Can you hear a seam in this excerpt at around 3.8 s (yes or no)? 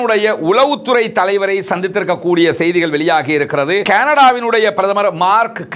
yes